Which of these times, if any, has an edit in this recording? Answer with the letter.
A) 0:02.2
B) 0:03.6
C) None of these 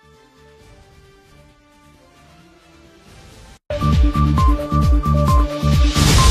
B